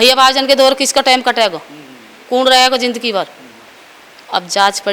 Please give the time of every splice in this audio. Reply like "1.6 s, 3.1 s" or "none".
none